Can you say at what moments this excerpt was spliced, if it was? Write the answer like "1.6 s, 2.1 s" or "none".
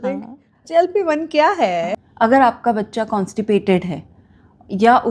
1.9 s